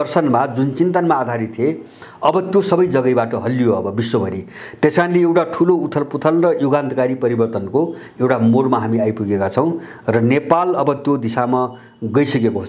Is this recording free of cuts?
yes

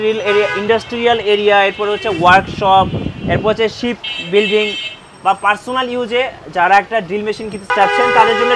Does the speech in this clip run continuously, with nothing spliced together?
no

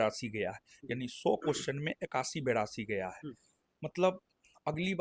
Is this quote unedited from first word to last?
yes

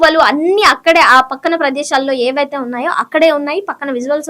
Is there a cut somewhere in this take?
no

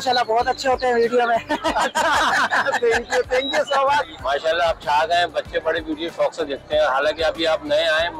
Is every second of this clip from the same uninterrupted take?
no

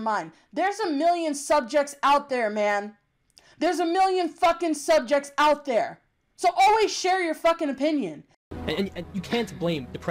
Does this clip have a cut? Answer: yes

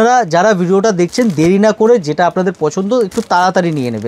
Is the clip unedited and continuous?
yes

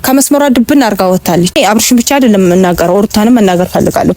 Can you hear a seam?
yes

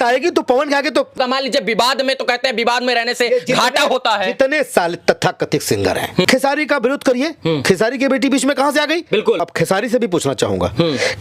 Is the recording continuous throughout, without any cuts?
no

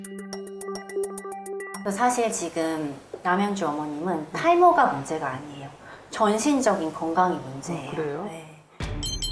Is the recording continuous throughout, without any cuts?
no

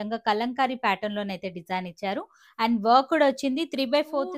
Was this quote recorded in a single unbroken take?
yes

